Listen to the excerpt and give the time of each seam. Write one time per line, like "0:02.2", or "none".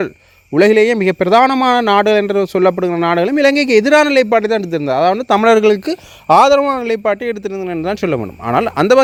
none